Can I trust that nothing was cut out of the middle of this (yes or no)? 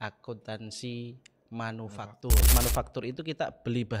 no